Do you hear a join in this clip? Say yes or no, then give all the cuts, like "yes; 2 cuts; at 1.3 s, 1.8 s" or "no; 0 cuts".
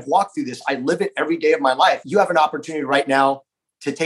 yes; 1 cut; at 2.0 s